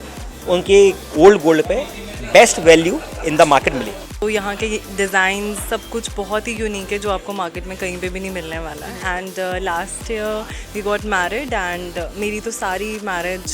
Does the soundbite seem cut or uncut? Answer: cut